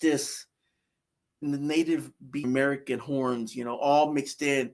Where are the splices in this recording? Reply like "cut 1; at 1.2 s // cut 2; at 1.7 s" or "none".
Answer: cut 1; at 1.4 s // cut 2; at 2.4 s